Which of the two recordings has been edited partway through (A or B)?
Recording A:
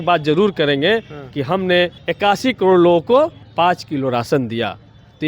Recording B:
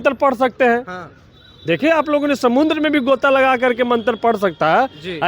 A